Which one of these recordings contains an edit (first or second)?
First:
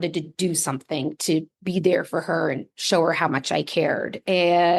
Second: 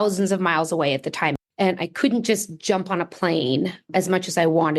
second